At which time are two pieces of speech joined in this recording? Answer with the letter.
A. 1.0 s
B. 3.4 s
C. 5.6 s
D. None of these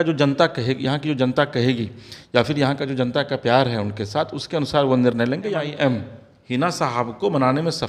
C